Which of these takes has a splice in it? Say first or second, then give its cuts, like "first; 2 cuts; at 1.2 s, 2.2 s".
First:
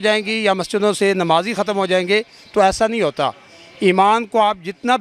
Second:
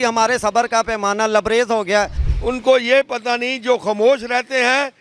second; 1 cut; at 2.2 s